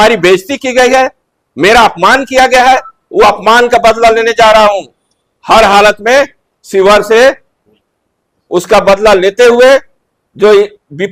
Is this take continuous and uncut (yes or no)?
yes